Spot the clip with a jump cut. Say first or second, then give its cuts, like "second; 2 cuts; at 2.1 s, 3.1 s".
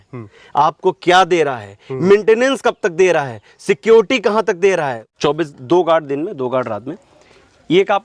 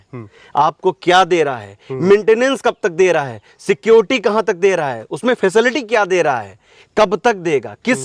first; 1 cut; at 5.0 s